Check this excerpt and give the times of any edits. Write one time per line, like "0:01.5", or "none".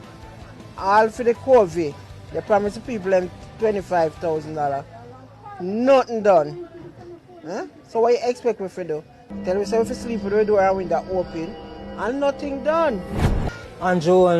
0:13.5